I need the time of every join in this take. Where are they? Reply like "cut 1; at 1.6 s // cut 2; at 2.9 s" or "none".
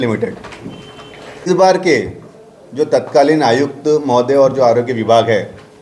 cut 1; at 1.5 s